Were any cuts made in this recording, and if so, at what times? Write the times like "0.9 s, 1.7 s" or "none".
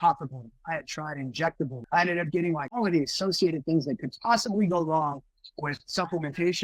1.8 s, 2.8 s